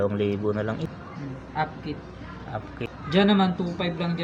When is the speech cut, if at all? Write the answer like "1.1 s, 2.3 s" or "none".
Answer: 0.9 s, 2.8 s